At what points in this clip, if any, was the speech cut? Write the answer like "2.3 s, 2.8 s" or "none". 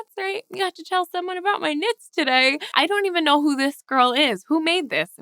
2.7 s